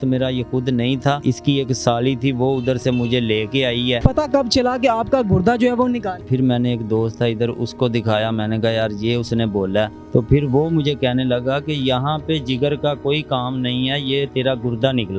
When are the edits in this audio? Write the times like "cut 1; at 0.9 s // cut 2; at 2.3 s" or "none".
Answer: cut 1; at 1.2 s // cut 2; at 4.0 s // cut 3; at 6.2 s // cut 4; at 10.0 s